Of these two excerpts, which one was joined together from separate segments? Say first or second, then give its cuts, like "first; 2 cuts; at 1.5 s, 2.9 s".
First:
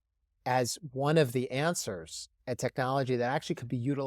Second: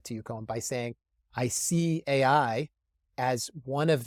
first; 1 cut; at 2.4 s